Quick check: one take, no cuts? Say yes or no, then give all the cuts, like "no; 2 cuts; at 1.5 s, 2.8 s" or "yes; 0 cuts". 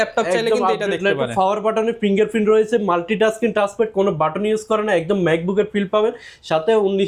yes; 0 cuts